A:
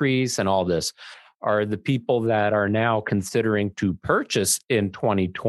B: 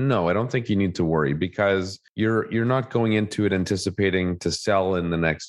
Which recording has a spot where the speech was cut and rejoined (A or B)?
B